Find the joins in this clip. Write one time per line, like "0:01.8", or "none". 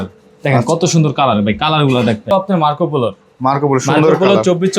0:02.3